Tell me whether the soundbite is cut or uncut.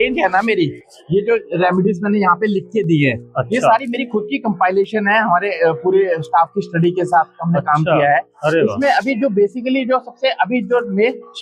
uncut